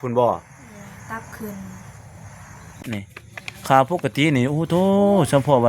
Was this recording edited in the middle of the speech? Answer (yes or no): yes